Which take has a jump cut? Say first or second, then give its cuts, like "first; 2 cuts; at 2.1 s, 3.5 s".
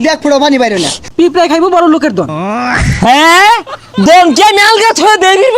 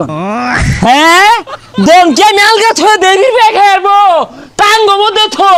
first; 1 cut; at 1.0 s